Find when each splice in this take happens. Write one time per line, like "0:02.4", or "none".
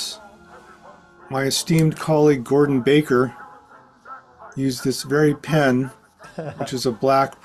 none